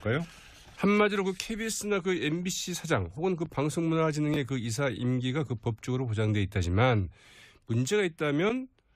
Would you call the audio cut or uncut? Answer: cut